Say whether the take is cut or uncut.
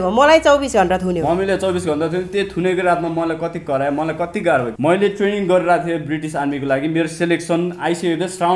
cut